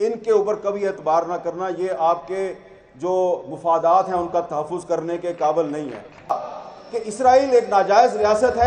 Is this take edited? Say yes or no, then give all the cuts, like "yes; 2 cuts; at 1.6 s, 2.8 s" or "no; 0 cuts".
yes; 1 cut; at 6.3 s